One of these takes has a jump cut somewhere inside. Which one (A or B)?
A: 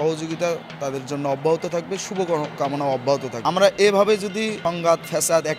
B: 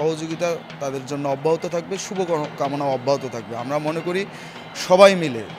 A